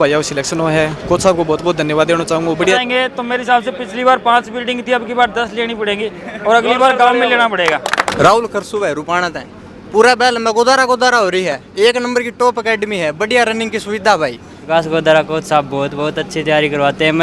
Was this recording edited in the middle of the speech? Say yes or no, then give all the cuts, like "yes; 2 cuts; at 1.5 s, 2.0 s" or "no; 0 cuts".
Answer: yes; 3 cuts; at 2.8 s, 8.1 s, 14.5 s